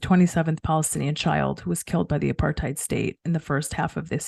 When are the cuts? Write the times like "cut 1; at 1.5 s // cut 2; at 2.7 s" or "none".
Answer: none